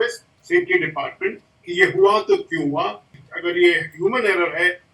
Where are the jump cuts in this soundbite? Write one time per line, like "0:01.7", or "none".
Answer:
0:03.2